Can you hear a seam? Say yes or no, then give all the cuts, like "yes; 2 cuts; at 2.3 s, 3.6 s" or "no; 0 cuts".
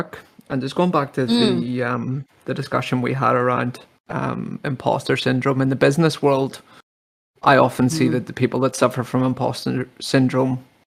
no; 0 cuts